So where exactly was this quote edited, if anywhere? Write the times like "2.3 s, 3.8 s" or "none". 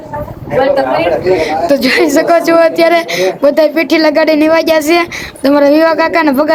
none